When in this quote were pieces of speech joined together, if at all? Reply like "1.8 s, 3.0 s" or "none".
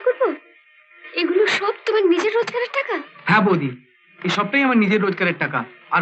none